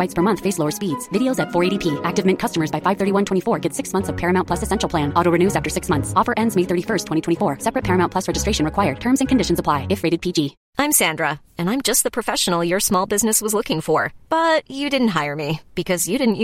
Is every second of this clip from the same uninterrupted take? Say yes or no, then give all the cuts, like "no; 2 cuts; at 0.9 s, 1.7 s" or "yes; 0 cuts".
no; 1 cut; at 10.6 s